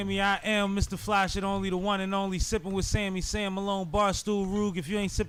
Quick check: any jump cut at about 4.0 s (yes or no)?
no